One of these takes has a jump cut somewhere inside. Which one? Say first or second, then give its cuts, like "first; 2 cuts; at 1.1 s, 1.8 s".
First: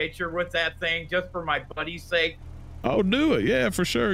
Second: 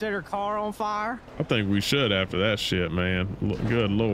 second; 1 cut; at 1.2 s